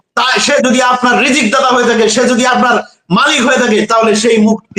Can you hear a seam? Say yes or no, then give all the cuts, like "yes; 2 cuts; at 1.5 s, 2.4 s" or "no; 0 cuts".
no; 0 cuts